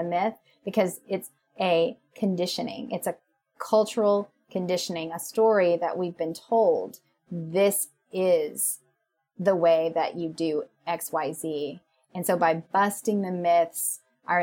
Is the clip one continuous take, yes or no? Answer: yes